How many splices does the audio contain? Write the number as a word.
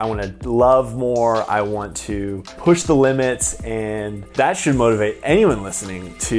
two